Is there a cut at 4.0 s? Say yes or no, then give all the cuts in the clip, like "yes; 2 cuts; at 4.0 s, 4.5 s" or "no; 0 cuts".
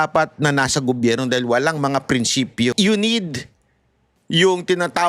no; 1 cut; at 2.7 s